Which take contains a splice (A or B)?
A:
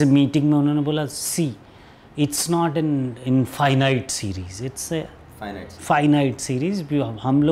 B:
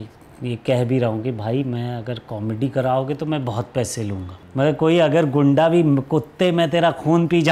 B